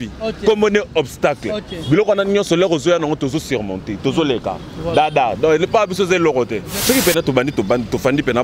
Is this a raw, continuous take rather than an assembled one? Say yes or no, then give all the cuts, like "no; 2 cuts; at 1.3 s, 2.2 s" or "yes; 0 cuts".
no; 1 cut; at 6.7 s